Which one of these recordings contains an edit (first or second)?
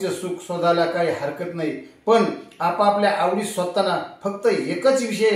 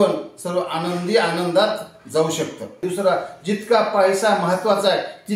second